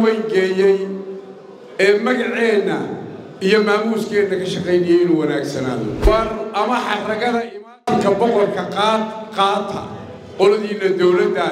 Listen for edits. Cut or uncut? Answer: cut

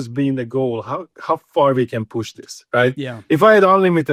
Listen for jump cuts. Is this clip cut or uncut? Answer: uncut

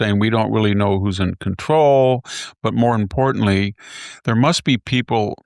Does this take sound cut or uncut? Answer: uncut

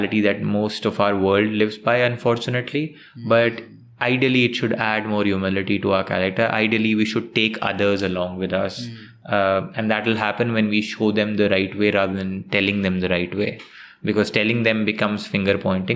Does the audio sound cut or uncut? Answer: uncut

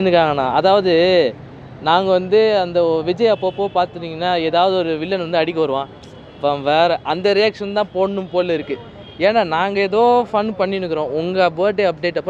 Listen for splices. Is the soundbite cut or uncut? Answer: uncut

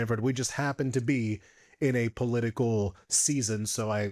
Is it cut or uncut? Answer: uncut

